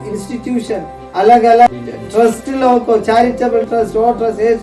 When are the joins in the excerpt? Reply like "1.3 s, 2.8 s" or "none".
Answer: 1.7 s